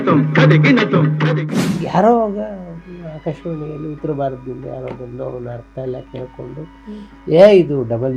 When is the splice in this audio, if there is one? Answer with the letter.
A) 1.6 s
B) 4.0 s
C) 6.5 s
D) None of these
A